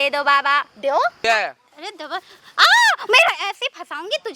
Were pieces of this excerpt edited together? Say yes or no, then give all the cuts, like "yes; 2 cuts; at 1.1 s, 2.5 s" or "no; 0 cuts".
yes; 1 cut; at 1.2 s